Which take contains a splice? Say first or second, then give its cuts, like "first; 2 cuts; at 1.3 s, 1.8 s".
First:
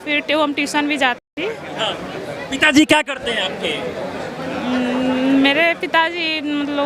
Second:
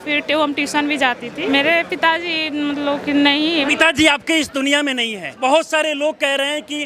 second; 3 cuts; at 1.5 s, 3.7 s, 5.6 s